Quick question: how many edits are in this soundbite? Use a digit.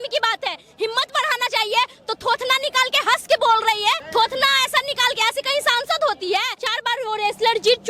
2